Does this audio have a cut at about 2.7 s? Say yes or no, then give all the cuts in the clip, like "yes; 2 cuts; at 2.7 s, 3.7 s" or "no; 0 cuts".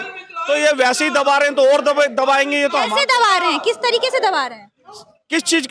no; 0 cuts